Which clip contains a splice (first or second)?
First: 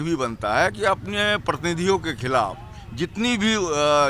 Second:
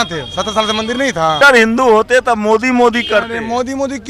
second